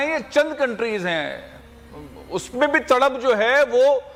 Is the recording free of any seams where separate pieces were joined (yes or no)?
yes